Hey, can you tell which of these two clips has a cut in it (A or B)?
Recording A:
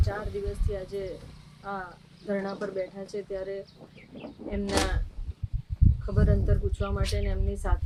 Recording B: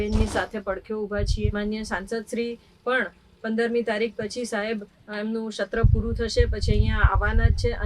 B